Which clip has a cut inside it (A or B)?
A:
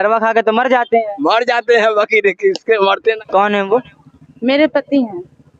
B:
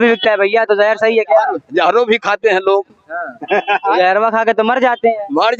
A